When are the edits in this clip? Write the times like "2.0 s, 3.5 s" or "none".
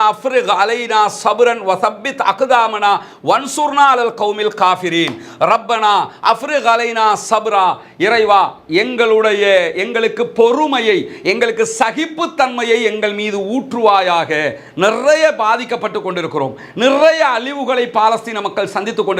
none